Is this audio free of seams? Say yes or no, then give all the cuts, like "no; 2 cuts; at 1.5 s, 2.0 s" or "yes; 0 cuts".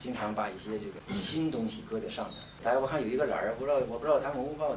no; 2 cuts; at 1.0 s, 2.5 s